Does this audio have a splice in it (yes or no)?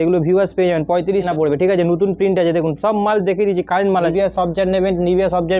yes